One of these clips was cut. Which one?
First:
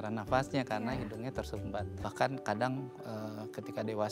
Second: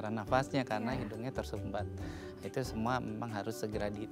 first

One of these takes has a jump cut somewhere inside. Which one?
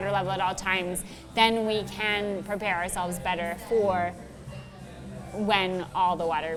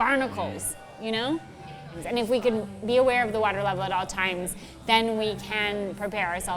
second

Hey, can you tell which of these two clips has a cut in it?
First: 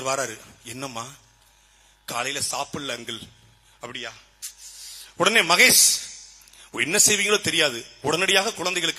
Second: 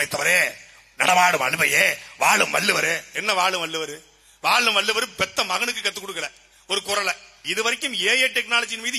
second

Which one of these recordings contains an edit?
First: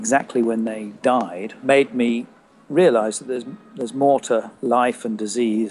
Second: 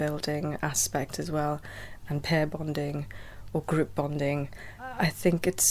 first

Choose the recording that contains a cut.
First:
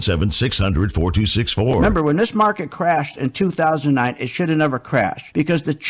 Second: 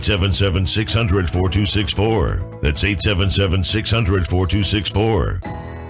first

